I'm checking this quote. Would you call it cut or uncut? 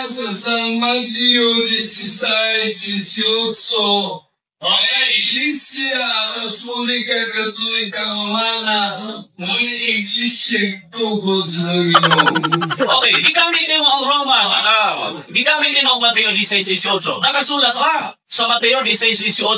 cut